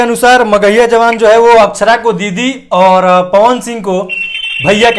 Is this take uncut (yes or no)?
yes